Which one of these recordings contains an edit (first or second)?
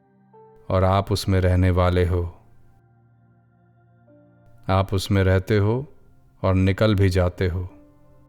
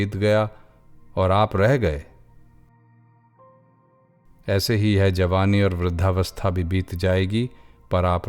first